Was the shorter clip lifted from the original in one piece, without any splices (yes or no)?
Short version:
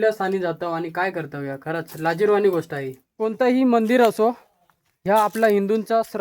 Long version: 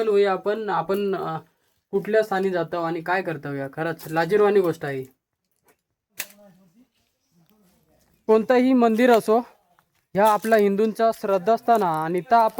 no